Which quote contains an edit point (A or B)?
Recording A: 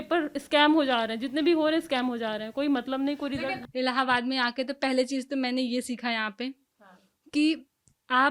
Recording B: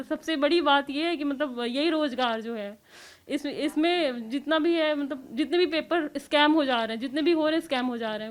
A